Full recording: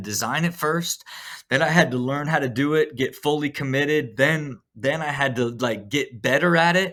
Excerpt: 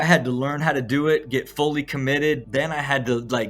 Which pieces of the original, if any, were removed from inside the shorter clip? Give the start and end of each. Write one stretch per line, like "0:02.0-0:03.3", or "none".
0:04.1-0:04.7